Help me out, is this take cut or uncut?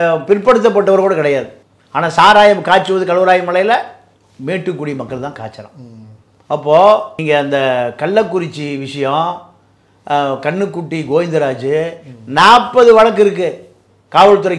cut